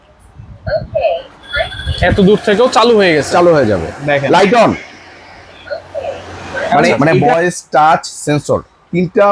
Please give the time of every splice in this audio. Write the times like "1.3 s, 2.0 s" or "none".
7.0 s